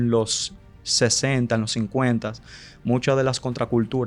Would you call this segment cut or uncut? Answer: uncut